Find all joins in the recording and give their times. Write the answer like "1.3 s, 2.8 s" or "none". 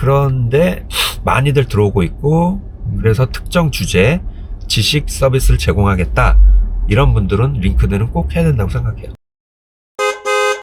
9.3 s